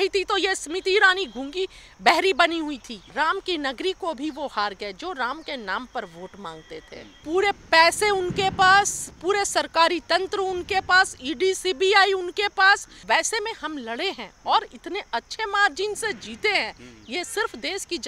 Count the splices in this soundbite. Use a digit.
3